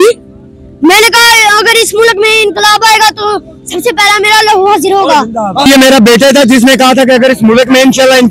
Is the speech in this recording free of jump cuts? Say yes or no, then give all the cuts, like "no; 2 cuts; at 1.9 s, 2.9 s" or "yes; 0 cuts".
no; 1 cut; at 5.7 s